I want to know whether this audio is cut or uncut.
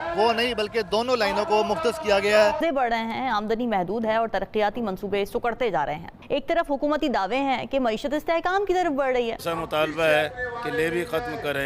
cut